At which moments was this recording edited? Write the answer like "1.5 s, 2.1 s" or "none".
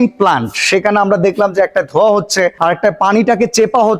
2.6 s